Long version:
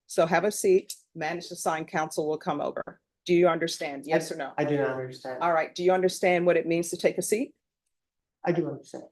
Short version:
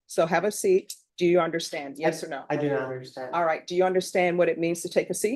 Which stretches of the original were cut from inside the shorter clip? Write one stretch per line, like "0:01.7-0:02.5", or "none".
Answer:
0:01.0-0:03.1